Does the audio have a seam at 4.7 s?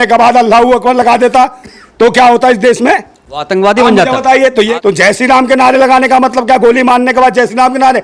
yes; 1 cut; at 4.7 s

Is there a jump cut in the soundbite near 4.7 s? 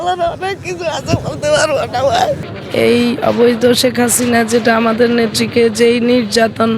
no; 1 cut; at 2.5 s

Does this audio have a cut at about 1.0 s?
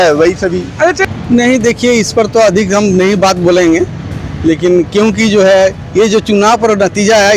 yes; 1 cut; at 1.0 s

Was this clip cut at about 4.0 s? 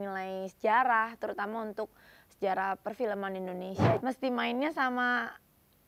yes; 1 cut; at 4.0 s

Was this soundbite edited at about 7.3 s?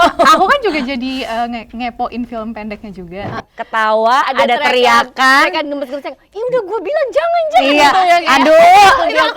no; 1 cut; at 3.4 s

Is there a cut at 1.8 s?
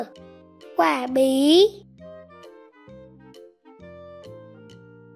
yes; 1 cut; at 1.8 s

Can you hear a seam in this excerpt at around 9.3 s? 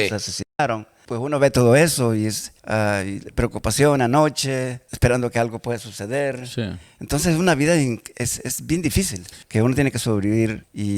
yes; 1 cut; at 9.3 s

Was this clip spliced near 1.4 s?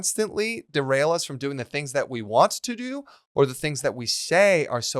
no; 0 cuts

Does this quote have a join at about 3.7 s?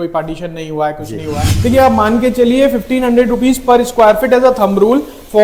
no; 1 cut; at 1.5 s

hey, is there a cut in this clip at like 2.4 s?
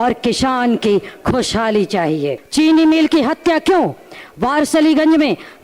yes; 1 cut; at 2.4 s

